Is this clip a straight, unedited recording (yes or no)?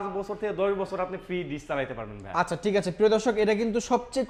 yes